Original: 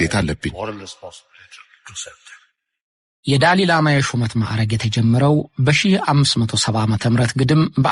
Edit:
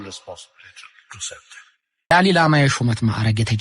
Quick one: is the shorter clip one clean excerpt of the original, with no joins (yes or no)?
no